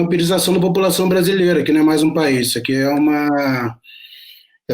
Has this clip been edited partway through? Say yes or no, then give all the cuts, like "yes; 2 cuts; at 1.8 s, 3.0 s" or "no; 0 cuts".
yes; 1 cut; at 1.6 s